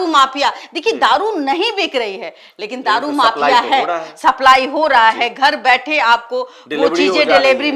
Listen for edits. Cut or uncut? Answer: uncut